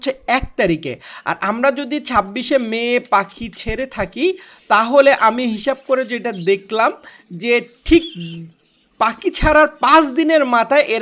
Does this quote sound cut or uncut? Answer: uncut